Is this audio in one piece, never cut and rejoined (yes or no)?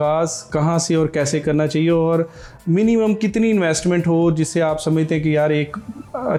yes